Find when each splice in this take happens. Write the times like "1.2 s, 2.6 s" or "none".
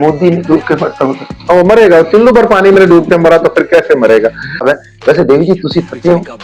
4.6 s